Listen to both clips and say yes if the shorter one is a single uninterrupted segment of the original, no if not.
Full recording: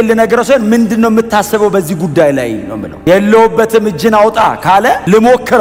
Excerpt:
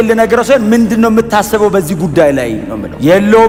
yes